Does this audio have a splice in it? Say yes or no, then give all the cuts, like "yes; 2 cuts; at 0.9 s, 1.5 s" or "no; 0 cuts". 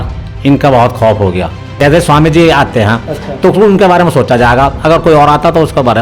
yes; 1 cut; at 1.6 s